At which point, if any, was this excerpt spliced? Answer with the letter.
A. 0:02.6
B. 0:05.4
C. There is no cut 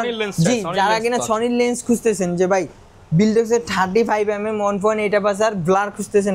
C